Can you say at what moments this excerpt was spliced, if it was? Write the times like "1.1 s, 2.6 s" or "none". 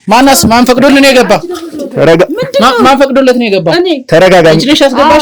none